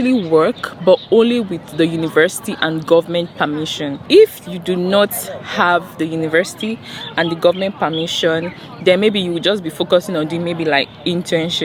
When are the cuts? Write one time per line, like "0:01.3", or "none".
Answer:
none